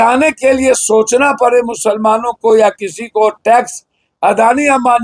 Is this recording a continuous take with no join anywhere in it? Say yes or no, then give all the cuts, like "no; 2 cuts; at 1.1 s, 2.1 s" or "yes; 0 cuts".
yes; 0 cuts